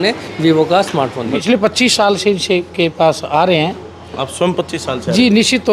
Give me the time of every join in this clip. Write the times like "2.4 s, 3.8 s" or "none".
1.4 s